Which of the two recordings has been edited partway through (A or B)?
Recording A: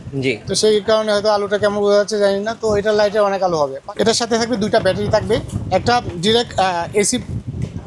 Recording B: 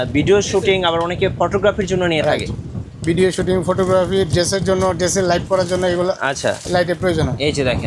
A